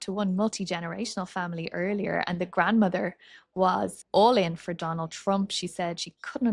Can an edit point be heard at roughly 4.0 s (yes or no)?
yes